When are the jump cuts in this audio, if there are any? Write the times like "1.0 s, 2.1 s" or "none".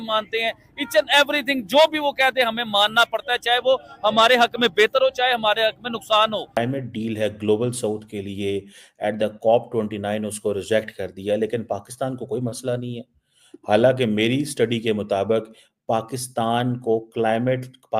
6.5 s